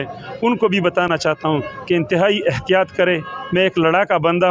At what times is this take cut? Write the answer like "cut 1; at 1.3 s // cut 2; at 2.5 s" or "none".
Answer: none